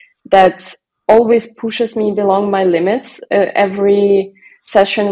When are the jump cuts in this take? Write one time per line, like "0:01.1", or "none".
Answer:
none